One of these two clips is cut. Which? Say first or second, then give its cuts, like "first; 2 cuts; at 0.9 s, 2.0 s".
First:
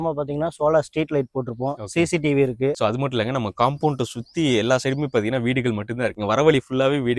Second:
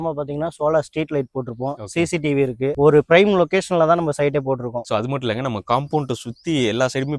first; 2 cuts; at 2.7 s, 6.2 s